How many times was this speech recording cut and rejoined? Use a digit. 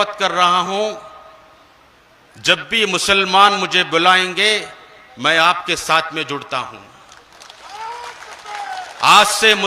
0